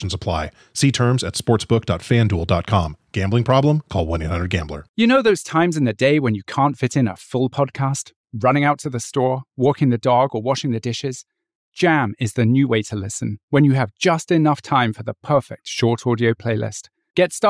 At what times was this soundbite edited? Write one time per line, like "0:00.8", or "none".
0:04.8